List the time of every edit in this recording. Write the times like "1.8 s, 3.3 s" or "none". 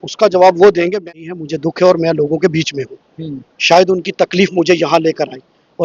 1.0 s